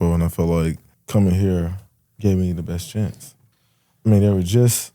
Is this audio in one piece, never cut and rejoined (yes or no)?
no